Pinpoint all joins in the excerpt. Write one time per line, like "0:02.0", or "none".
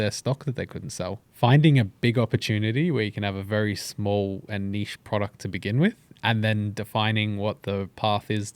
0:01.3